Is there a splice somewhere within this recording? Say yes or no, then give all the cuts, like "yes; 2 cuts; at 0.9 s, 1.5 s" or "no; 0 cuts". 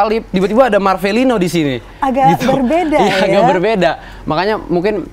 no; 0 cuts